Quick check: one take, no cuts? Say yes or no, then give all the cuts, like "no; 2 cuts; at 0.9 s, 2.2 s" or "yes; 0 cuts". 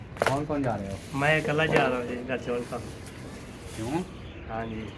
yes; 0 cuts